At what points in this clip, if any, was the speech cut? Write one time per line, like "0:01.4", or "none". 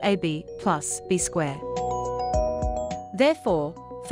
0:01.7
0:03.0